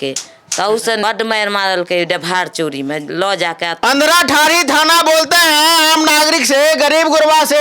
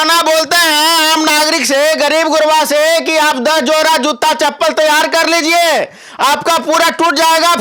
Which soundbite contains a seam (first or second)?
first